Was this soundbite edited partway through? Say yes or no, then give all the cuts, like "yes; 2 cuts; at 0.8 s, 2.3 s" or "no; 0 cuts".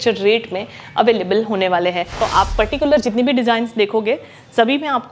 yes; 1 cut; at 2.1 s